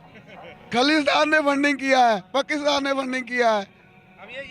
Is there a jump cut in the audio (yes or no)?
no